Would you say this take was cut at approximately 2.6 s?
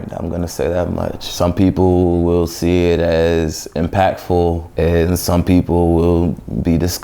no; 2 cuts; at 1.2 s, 4.7 s

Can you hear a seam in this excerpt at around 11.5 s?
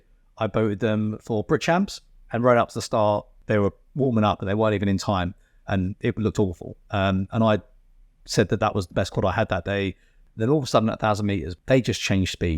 yes; 3 cuts; at 3.4 s, 10.2 s, 11.5 s

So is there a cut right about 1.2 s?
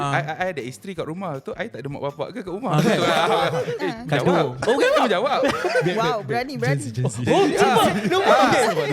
no; 1 cut; at 3.8 s

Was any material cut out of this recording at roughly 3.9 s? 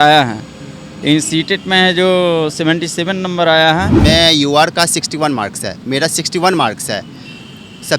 yes; 1 cut; at 3.9 s

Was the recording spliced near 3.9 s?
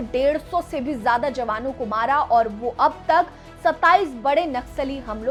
no; 0 cuts

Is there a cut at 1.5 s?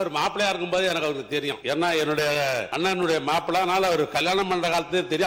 yes; 2 cuts; at 1.5 s, 2.7 s

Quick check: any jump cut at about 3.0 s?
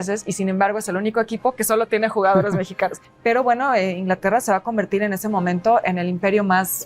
yes; 1 cut; at 3.0 s

